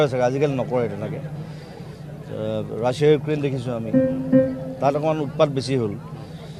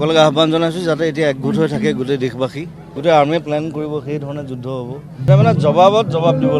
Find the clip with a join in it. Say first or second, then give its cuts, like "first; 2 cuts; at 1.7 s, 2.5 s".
second; 2 cuts; at 2.8 s, 5.3 s